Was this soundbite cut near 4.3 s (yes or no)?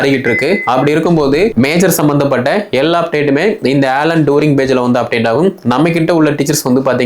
no